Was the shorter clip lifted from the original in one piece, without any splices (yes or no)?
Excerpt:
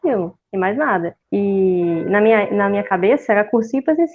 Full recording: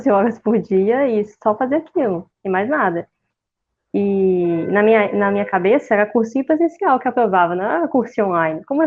no